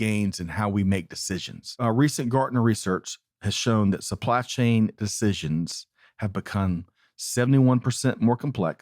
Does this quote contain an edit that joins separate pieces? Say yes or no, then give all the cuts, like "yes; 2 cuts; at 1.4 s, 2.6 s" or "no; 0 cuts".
yes; 1 cut; at 1.8 s